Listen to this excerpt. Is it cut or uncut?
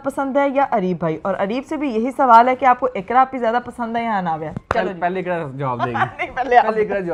uncut